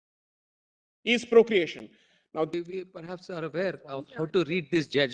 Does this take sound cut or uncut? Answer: cut